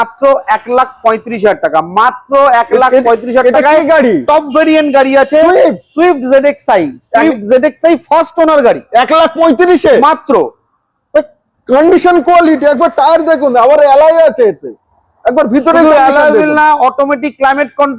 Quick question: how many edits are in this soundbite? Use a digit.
0